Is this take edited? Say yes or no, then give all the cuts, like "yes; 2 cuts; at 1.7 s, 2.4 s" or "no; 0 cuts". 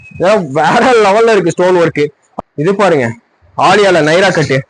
yes; 1 cut; at 2.2 s